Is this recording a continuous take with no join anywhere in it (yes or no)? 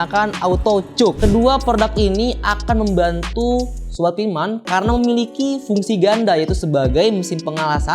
no